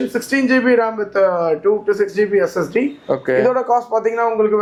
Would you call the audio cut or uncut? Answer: uncut